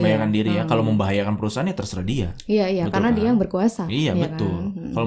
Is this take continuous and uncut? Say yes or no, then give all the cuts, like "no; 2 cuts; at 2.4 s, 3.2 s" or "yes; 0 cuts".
yes; 0 cuts